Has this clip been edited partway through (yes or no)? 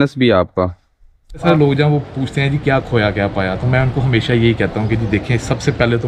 yes